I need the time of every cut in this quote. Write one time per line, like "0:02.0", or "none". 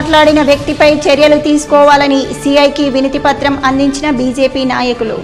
none